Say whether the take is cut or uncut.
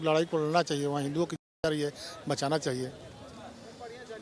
uncut